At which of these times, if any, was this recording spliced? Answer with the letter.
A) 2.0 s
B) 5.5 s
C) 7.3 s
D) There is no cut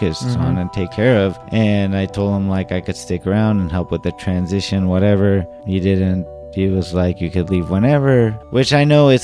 D